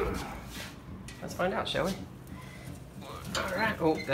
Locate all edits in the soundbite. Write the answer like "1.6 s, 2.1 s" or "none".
3.2 s